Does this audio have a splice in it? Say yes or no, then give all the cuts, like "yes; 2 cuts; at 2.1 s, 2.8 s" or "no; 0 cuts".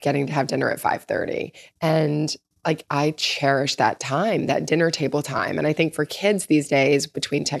no; 0 cuts